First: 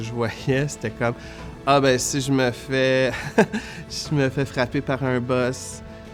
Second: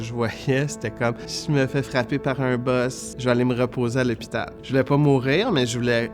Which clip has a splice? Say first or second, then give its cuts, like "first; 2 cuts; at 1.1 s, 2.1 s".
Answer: second; 3 cuts; at 1.3 s, 3.0 s, 4.5 s